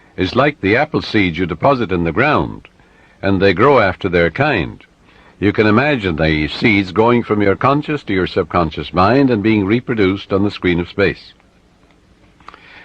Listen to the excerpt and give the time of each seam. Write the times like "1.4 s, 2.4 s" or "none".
8.3 s